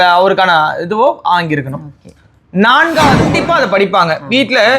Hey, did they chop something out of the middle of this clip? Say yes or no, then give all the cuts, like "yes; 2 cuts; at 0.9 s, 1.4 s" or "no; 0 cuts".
yes; 1 cut; at 3.3 s